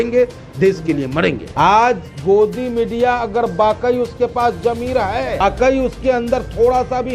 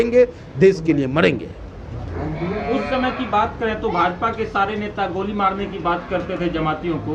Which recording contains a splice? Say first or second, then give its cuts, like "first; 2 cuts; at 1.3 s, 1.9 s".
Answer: first; 2 cuts; at 1.4 s, 5.4 s